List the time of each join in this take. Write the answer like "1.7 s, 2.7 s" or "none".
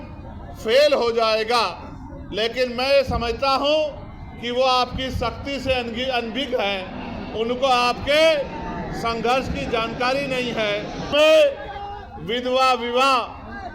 11.1 s